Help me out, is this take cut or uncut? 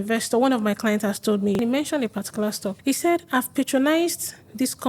cut